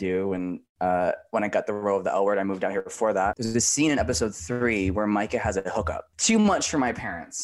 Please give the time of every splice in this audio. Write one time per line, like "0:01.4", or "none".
0:03.4
0:06.0